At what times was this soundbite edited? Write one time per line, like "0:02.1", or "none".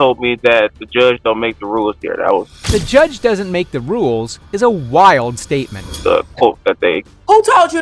none